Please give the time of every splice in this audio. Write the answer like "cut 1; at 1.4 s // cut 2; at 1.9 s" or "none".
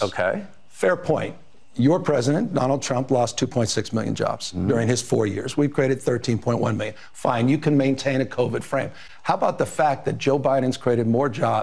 none